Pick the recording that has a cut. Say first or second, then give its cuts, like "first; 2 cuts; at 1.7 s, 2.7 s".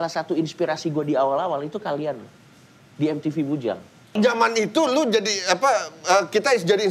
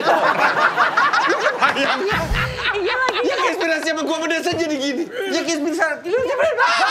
first; 1 cut; at 4.1 s